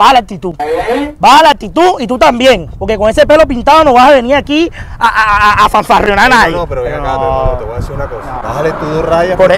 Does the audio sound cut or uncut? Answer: uncut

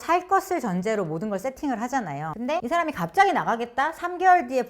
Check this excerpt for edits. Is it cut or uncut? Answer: cut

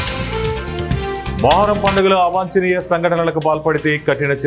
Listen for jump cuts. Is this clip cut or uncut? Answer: uncut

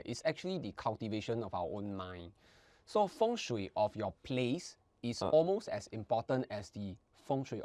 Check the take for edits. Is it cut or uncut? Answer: uncut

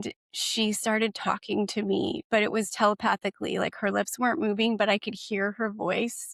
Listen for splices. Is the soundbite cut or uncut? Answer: uncut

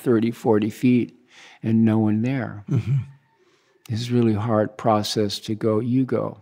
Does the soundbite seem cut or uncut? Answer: uncut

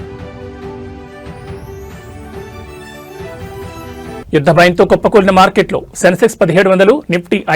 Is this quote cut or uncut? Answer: cut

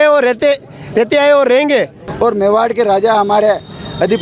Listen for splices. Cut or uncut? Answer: cut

